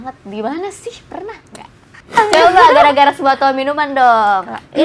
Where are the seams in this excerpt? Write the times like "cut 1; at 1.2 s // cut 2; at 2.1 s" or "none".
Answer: cut 1; at 2.2 s